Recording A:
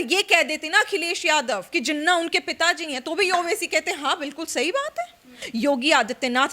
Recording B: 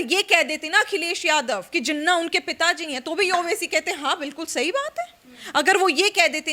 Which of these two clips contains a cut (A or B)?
A